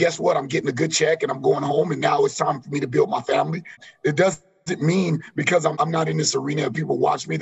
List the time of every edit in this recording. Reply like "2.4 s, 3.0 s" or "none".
3.8 s, 5.8 s